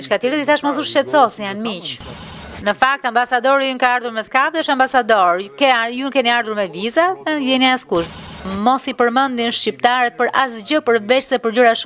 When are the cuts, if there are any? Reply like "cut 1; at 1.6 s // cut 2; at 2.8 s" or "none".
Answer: cut 1; at 2.5 s // cut 2; at 8.5 s